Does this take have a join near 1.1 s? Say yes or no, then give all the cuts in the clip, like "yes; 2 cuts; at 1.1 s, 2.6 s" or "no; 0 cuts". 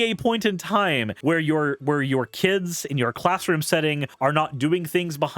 yes; 2 cuts; at 1.1 s, 4.1 s